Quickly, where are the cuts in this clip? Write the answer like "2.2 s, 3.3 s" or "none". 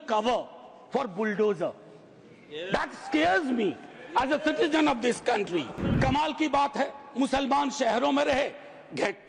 5.8 s